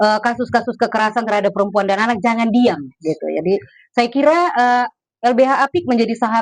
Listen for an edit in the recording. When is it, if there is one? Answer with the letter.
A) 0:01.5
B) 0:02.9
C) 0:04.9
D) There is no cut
D